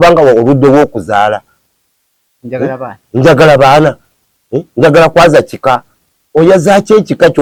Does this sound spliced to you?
no; 0 cuts

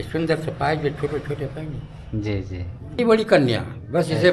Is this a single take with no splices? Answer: no; 1 cut; at 3.0 s

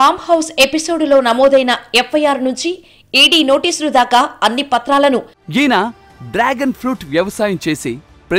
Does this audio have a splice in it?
yes; 1 cut; at 5.4 s

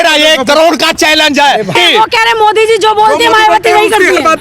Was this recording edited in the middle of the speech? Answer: yes; 1 cut; at 1.7 s

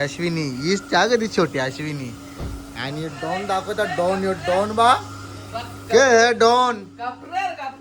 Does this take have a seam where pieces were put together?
no; 0 cuts

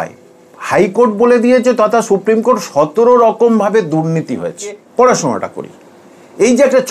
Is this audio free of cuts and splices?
no; 1 cut; at 4.8 s

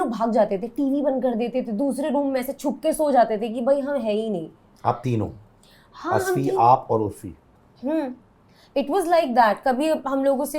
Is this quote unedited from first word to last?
yes; 0 cuts

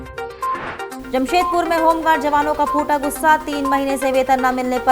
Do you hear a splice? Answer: yes; 1 cut; at 0.9 s

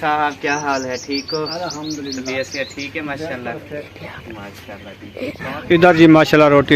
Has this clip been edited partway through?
yes; 1 cut; at 5.6 s

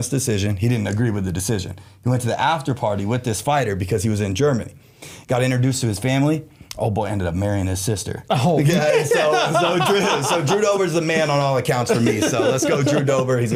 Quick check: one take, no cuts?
yes; 0 cuts

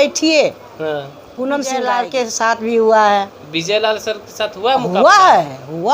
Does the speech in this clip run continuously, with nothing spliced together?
no; 1 cut; at 1.6 s

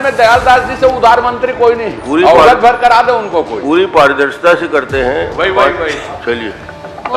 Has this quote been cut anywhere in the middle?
no; 0 cuts

